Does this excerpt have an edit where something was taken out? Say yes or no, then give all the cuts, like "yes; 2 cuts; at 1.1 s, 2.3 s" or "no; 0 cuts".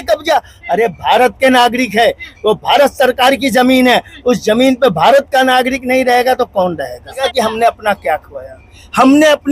yes; 1 cut; at 7.3 s